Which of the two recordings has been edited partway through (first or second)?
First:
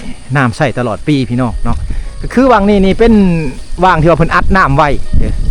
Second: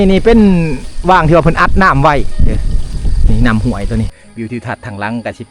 second